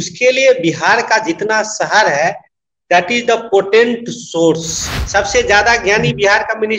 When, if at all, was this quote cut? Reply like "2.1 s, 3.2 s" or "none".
4.9 s